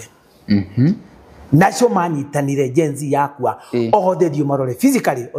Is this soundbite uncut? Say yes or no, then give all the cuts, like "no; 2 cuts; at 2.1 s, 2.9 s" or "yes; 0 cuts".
yes; 0 cuts